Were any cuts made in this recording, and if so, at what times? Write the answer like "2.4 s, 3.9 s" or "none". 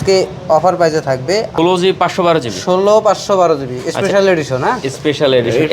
1.5 s